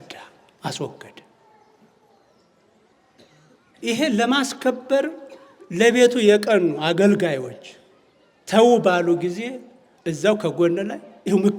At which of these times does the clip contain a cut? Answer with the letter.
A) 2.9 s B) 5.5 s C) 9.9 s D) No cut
A